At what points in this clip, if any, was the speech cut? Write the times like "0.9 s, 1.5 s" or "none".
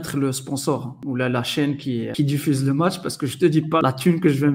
0.9 s, 2.1 s, 3.8 s